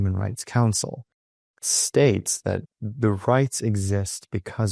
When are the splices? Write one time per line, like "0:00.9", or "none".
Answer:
0:01.1
0:02.8